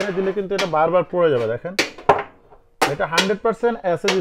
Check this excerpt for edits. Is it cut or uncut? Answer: uncut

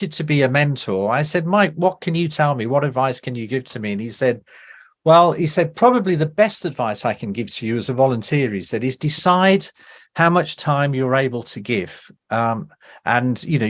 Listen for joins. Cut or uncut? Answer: uncut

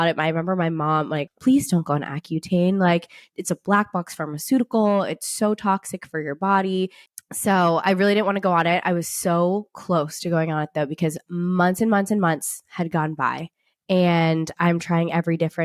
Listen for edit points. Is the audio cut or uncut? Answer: cut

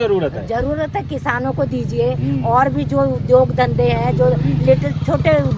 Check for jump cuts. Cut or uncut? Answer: uncut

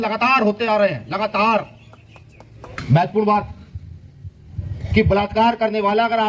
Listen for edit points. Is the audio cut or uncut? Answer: cut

